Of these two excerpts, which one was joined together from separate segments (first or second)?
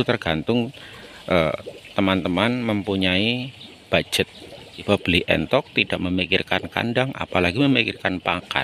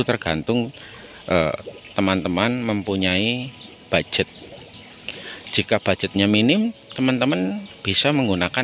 first